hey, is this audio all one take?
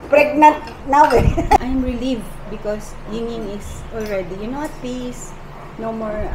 no; 1 cut; at 1.6 s

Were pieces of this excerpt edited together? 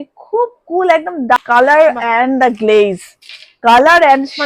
yes; 1 cut; at 1.4 s

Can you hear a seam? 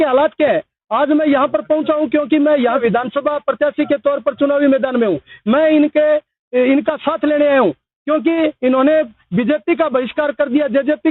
yes; 1 cut; at 2.8 s

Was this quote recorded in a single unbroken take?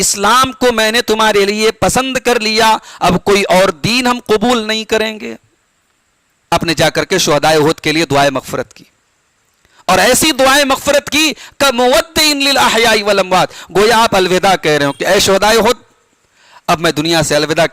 no; 1 cut; at 6.5 s

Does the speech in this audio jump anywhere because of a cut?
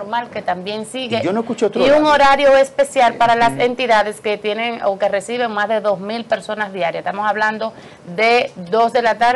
no; 0 cuts

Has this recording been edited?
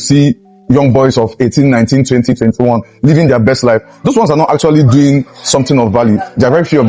no; 0 cuts

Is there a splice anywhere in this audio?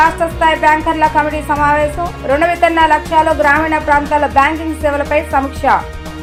no; 0 cuts

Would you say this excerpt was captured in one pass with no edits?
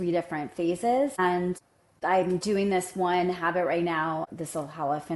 yes; 0 cuts

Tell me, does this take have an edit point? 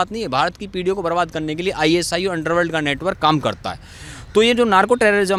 no; 0 cuts

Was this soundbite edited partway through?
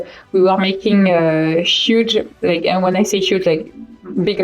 yes; 1 cut; at 2.3 s

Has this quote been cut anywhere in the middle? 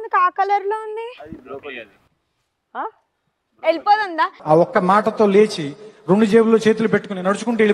no; 0 cuts

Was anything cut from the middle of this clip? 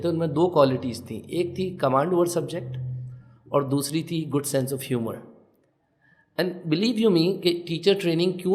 no; 0 cuts

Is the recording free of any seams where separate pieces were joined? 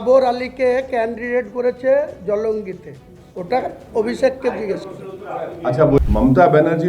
no; 1 cut; at 6.0 s

